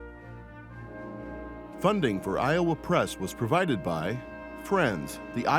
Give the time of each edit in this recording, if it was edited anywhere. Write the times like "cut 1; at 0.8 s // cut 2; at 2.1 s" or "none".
cut 1; at 1.8 s